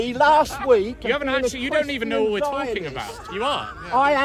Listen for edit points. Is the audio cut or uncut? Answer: uncut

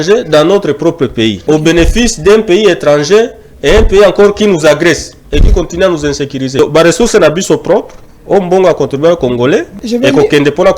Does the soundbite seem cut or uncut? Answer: cut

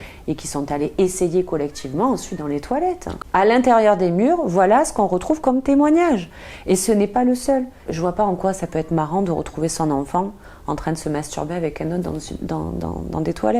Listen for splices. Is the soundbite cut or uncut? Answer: cut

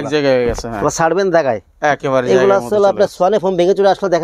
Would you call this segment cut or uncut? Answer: uncut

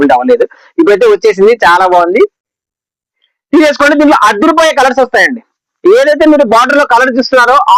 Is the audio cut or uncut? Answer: uncut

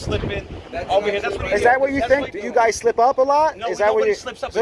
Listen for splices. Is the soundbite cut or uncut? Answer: cut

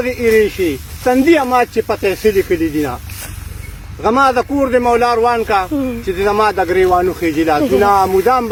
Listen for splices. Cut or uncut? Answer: uncut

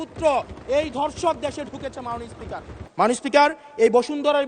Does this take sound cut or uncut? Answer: cut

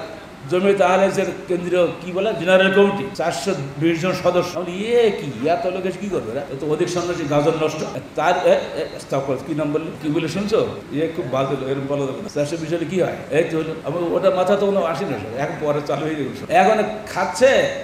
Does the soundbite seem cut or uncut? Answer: cut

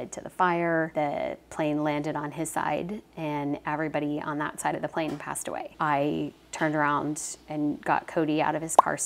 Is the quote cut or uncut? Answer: cut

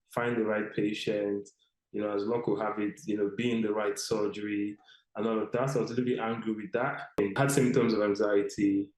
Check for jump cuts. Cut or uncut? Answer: cut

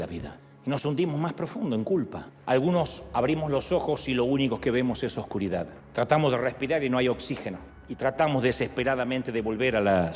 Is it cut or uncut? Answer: uncut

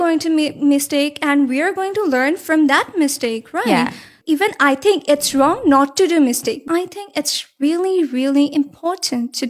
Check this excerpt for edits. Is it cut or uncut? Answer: cut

